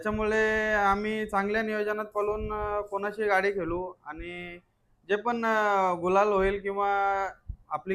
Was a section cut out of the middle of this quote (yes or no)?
no